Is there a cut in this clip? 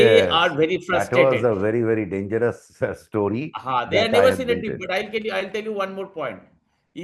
no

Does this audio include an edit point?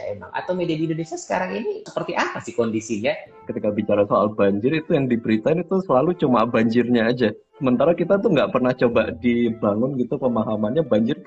yes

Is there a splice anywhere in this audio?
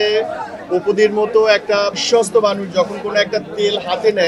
yes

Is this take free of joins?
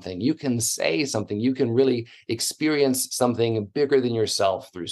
yes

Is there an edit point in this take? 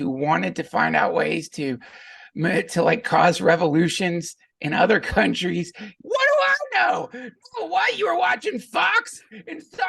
yes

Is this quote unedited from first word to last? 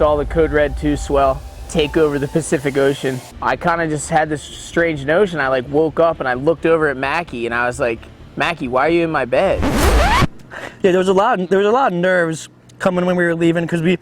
no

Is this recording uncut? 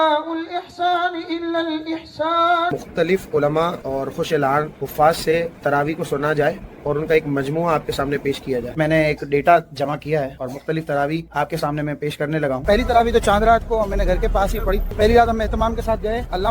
no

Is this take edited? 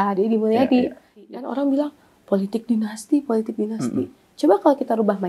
yes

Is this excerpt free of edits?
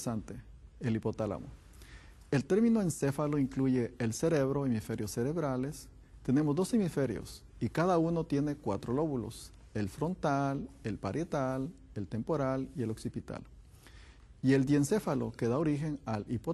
yes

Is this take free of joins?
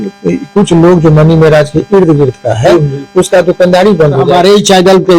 no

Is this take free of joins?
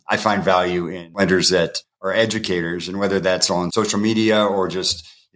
no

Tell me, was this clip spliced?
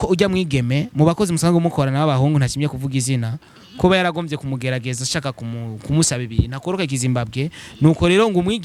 no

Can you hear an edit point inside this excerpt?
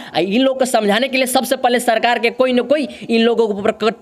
no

